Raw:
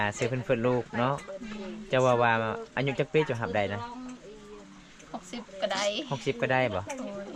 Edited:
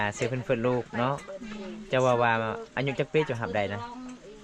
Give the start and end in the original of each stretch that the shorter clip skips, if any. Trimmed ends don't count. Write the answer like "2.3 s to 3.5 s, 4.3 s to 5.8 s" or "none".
none